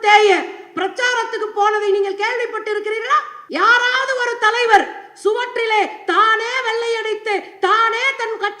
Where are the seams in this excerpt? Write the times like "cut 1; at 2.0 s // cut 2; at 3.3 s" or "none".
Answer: cut 1; at 3.4 s